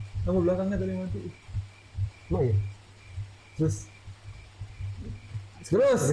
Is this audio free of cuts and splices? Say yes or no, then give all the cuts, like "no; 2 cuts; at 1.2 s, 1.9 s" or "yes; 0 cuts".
yes; 0 cuts